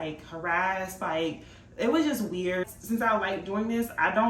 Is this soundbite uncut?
no; 1 cut; at 2.7 s

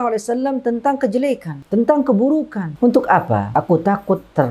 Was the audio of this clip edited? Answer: yes; 3 cuts; at 1.5 s, 2.6 s, 3.5 s

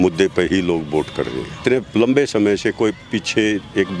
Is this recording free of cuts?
no; 1 cut; at 1.6 s

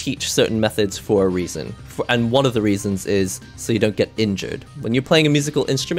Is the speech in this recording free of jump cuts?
yes; 0 cuts

